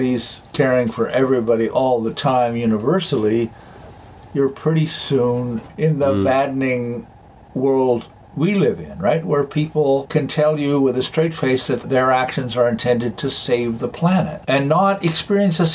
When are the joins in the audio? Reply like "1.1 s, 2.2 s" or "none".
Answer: 5.7 s, 10.1 s, 14.4 s